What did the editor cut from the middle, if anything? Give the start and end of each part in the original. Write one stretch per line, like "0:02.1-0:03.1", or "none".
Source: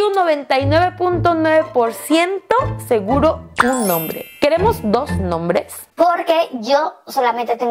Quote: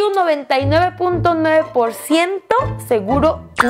none